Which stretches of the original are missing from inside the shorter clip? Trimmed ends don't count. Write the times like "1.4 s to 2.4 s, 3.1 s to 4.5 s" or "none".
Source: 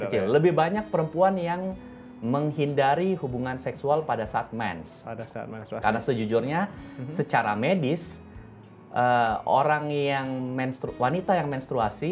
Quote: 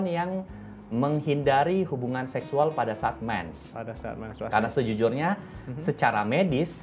none